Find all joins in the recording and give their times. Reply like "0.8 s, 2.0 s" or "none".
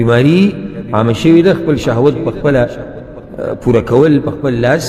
none